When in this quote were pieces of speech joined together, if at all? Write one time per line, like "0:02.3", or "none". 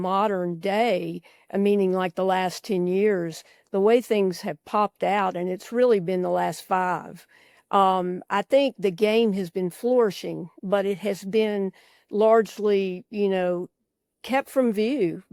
none